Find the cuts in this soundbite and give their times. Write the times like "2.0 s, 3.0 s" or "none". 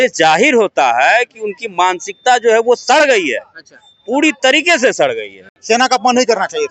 5.5 s